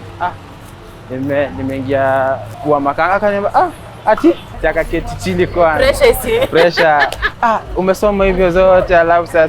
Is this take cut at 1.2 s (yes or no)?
no